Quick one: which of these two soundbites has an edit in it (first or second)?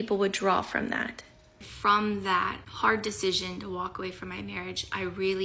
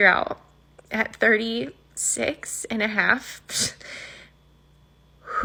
first